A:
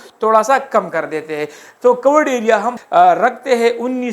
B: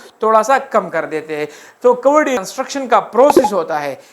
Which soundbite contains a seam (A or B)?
B